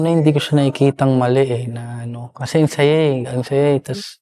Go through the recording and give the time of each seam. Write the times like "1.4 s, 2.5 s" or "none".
none

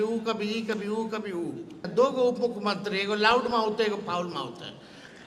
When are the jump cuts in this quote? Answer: 1.9 s

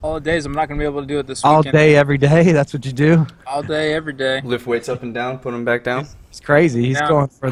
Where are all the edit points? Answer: none

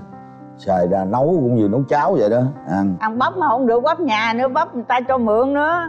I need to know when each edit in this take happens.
none

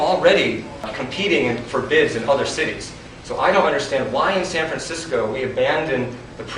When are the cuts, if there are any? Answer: 0.9 s

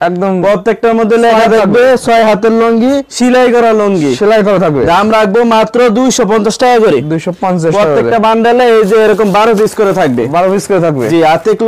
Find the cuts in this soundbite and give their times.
none

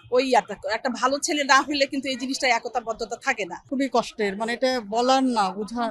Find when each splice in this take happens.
3.6 s

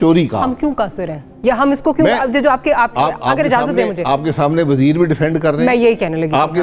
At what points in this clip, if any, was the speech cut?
none

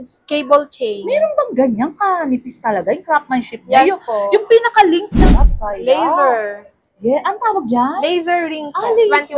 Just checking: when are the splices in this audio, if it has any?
5.2 s

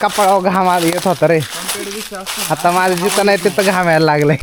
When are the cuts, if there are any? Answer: none

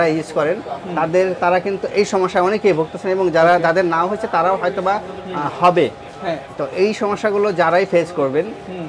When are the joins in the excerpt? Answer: none

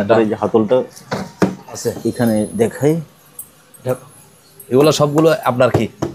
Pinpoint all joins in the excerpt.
1.8 s

